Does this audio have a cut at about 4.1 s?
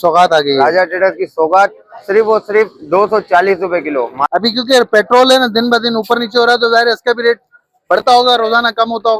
yes; 1 cut; at 4.1 s

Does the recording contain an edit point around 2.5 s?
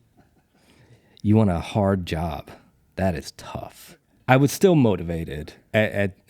no; 1 cut; at 3.9 s

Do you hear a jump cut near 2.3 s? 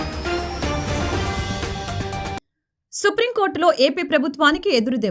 no; 0 cuts

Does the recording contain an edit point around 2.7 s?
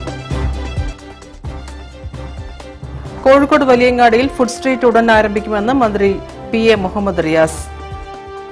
no; 1 cut; at 1.0 s

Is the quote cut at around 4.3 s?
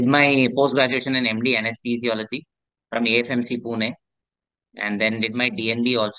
no; 0 cuts

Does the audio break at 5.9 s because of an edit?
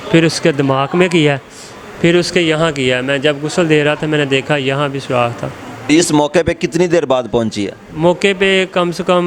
yes; 1 cut; at 5.9 s

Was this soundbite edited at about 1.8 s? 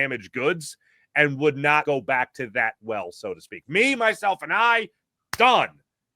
yes; 1 cut; at 1.8 s

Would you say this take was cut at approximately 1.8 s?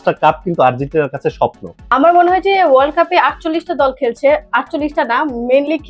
yes; 1 cut; at 1.8 s

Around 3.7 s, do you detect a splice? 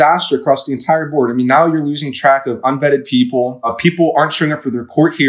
yes; 1 cut; at 3.7 s

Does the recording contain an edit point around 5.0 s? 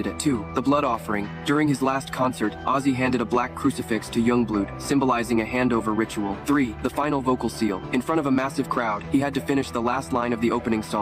no; 0 cuts

